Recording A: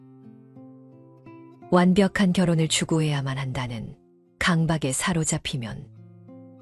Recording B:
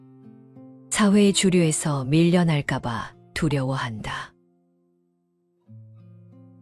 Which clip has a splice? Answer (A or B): B